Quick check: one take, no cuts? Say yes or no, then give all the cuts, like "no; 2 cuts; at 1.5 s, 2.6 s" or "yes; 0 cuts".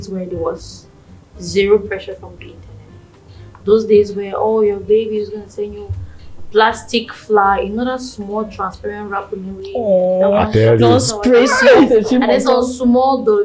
yes; 0 cuts